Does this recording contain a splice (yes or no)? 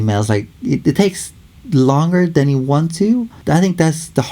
yes